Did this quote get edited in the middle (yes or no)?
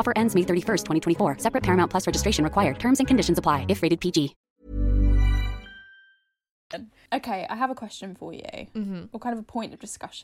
no